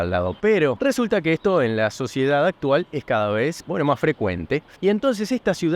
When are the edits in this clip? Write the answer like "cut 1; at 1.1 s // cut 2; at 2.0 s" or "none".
cut 1; at 0.8 s // cut 2; at 3.6 s // cut 3; at 4.7 s